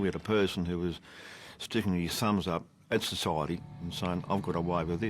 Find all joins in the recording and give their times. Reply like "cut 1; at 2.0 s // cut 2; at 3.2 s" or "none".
cut 1; at 3.6 s